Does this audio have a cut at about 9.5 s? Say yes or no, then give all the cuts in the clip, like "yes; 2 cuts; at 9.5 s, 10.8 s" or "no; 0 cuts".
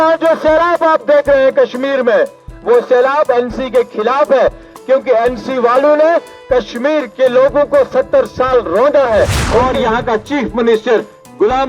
yes; 1 cut; at 9.5 s